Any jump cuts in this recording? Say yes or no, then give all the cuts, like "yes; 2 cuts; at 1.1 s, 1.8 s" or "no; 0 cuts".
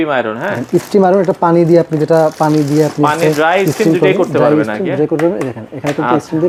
no; 0 cuts